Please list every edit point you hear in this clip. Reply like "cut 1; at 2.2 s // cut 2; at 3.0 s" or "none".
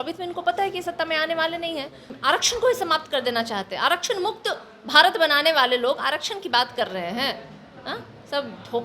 cut 1; at 2.1 s